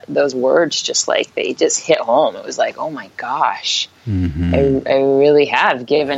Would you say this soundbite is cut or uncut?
uncut